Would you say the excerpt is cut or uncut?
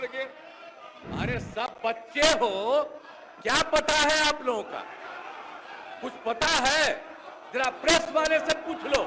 cut